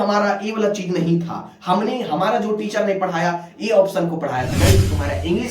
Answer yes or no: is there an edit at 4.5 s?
yes